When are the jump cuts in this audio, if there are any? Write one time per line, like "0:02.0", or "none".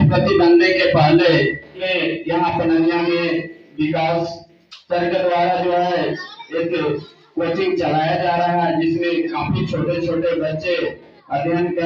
0:01.8

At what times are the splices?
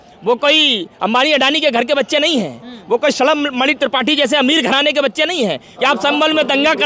0:05.7

